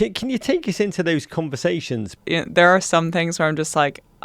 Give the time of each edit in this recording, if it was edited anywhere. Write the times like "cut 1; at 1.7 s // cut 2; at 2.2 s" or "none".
cut 1; at 2.2 s